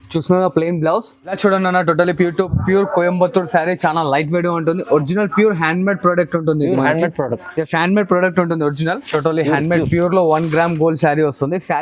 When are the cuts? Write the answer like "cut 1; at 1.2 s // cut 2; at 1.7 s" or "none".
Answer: cut 1; at 1.2 s // cut 2; at 9.0 s